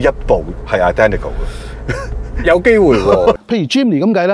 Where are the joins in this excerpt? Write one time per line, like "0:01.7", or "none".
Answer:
0:03.4